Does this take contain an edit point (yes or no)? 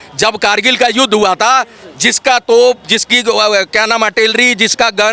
no